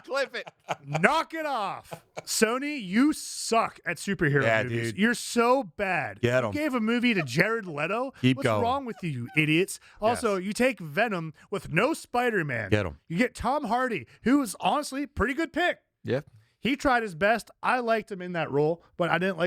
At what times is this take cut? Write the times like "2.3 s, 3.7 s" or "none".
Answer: none